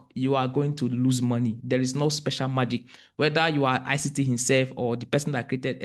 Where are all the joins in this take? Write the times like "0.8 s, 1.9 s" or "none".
none